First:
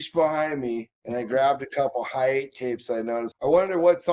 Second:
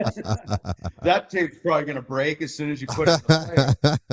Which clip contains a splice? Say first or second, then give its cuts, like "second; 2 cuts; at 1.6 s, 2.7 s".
first; 2 cuts; at 0.9 s, 3.3 s